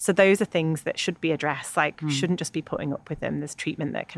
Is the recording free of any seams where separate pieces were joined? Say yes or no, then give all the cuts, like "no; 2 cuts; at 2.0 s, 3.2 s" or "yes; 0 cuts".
yes; 0 cuts